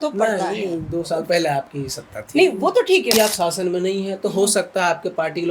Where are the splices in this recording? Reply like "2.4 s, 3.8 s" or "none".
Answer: 3.1 s